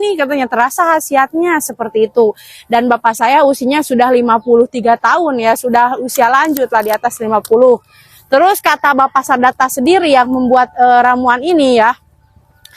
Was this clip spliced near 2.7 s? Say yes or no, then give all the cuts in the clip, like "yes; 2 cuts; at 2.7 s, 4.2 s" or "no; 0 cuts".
no; 0 cuts